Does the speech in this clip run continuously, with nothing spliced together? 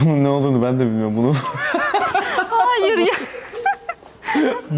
yes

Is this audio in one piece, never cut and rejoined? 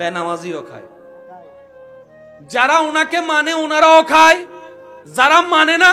yes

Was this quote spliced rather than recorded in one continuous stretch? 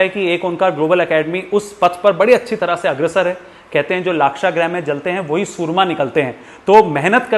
no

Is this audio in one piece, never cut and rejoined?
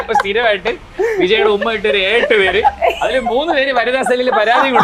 yes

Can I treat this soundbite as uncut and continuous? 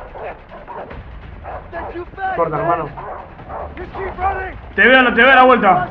yes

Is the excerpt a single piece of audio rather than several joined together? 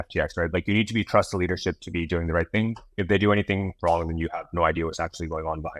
yes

